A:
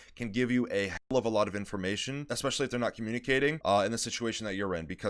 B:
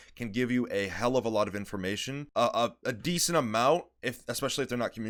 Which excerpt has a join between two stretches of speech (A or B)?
A